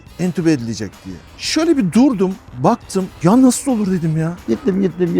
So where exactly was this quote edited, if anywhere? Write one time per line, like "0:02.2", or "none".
0:01.3
0:04.4

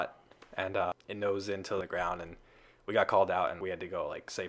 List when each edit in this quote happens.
0:01.8
0:03.6

